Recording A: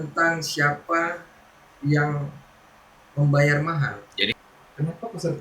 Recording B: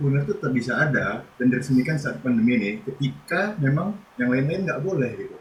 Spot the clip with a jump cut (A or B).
A